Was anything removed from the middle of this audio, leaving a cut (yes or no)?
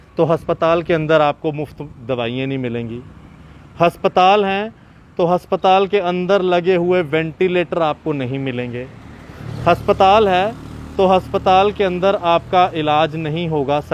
no